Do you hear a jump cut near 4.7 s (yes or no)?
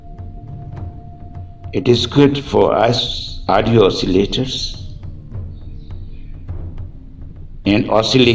yes